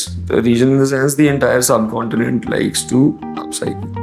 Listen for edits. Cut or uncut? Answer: uncut